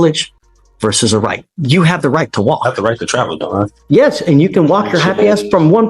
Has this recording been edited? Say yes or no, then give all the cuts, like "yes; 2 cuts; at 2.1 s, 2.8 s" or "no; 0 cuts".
yes; 1 cut; at 3.8 s